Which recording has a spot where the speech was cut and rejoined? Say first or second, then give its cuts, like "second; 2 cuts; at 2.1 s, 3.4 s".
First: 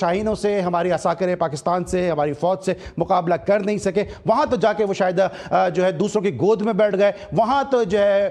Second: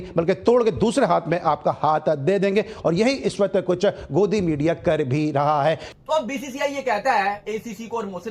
second; 1 cut; at 5.9 s